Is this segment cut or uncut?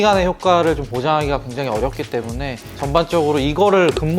cut